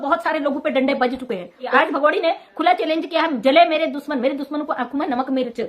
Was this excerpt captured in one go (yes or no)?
no